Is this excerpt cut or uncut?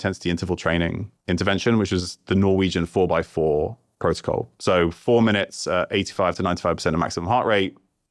uncut